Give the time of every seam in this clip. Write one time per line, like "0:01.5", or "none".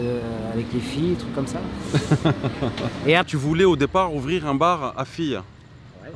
0:03.3